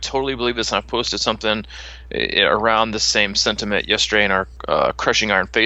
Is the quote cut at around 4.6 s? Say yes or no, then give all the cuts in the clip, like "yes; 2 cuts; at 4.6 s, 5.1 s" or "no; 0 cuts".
yes; 1 cut; at 4.6 s